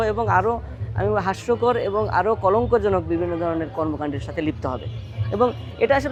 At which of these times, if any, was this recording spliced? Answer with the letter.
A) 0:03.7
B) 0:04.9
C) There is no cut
C